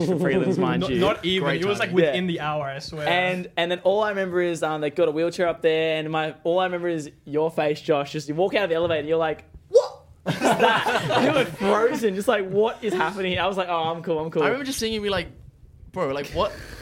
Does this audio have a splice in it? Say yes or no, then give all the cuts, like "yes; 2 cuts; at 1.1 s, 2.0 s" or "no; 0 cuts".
no; 0 cuts